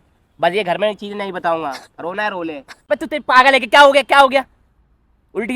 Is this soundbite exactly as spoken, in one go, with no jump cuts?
no; 1 cut; at 2.7 s

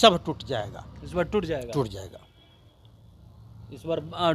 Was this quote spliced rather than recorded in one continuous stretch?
no; 0 cuts

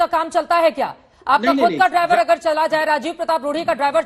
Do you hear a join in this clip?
no; 0 cuts

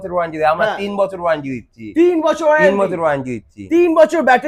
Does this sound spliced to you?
no; 0 cuts

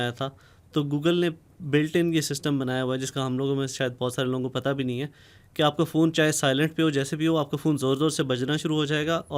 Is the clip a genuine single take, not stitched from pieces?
yes; 0 cuts

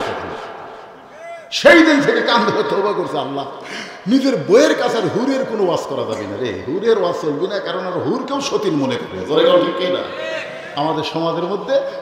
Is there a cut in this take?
yes; 1 cut; at 10.6 s

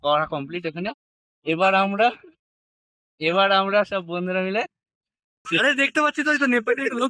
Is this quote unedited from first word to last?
no; 1 cut; at 5.5 s

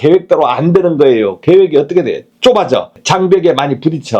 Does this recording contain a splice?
yes; 2 cuts; at 2.3 s, 3.0 s

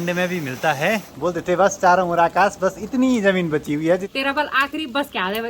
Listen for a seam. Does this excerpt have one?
yes; 2 cuts; at 1.1 s, 4.1 s

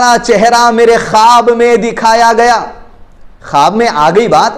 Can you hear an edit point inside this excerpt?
no; 0 cuts

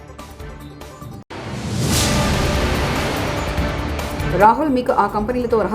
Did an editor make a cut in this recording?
no; 0 cuts

